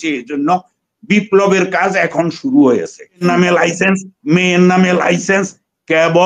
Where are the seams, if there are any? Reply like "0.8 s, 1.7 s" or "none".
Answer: 3.2 s